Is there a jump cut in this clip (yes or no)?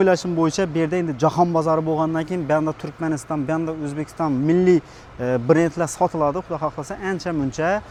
no